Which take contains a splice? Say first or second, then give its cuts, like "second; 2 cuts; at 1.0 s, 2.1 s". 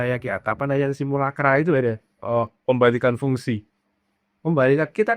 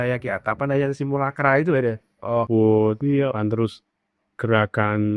second; 1 cut; at 2.5 s